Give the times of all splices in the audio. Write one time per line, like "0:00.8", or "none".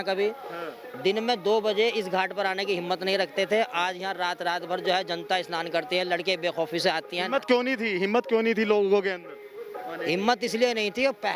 none